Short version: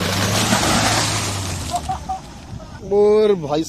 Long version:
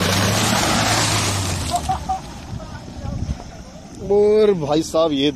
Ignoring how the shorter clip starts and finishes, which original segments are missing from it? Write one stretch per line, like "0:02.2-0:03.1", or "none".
0:02.7-0:03.9

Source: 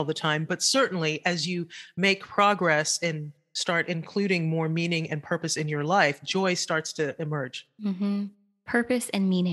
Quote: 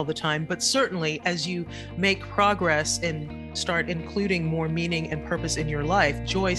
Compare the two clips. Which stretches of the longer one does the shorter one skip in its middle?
none

